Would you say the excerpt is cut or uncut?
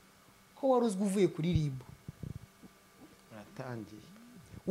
uncut